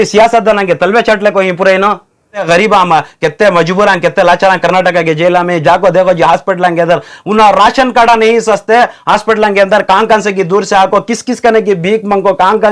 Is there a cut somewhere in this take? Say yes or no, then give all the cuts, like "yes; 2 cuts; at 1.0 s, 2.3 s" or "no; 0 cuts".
yes; 1 cut; at 2.3 s